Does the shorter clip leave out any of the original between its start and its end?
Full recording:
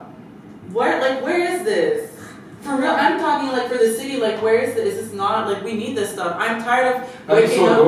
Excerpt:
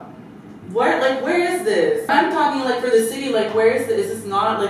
yes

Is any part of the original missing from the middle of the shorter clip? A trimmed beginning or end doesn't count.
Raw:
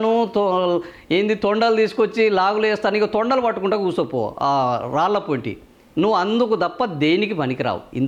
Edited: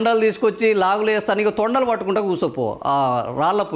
no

